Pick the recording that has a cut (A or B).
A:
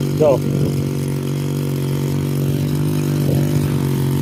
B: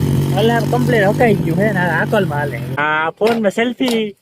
B